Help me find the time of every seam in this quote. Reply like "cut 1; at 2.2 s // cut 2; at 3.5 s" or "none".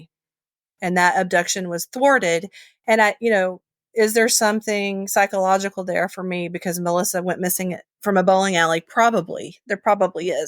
cut 1; at 1.9 s